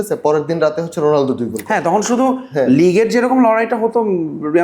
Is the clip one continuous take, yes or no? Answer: yes